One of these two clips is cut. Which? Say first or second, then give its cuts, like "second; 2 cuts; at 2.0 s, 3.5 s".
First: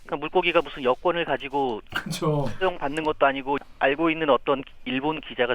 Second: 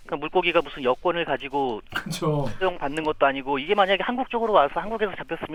first; 1 cut; at 3.6 s